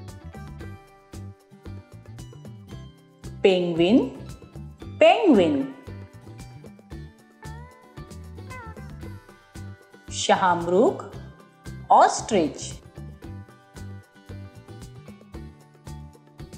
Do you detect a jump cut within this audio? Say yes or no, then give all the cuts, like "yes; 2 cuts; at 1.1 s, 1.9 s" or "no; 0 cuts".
no; 0 cuts